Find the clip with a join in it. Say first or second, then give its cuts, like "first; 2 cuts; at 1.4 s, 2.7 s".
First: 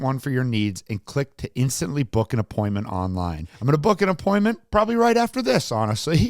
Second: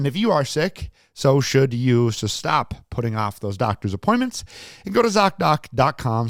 first; 1 cut; at 3.5 s